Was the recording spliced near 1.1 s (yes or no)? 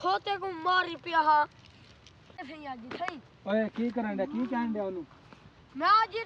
no